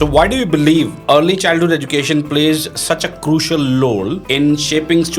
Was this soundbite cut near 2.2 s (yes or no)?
no